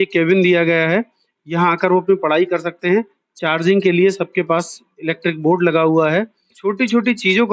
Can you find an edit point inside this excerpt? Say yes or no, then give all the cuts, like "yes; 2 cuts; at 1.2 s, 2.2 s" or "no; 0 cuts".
yes; 1 cut; at 6.5 s